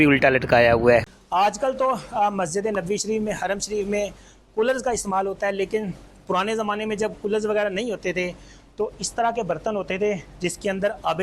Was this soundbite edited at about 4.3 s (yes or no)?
no